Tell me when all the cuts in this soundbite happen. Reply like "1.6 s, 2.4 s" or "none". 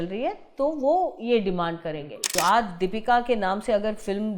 2.3 s